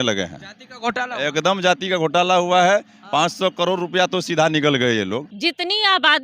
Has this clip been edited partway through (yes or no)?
yes